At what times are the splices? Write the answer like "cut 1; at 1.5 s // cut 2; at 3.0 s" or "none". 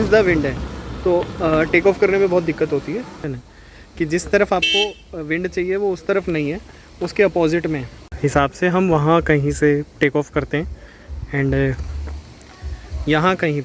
cut 1; at 3.2 s // cut 2; at 8.0 s